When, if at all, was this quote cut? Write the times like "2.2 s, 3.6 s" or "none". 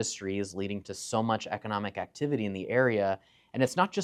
none